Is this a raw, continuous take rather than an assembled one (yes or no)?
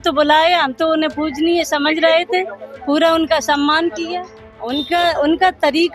no